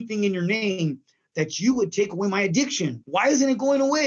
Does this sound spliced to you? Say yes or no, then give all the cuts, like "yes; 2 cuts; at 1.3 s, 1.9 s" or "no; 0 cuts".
yes; 1 cut; at 3.0 s